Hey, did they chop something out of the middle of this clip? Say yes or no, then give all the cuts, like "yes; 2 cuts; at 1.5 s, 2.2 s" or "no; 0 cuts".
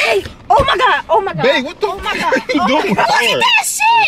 yes; 1 cut; at 3.1 s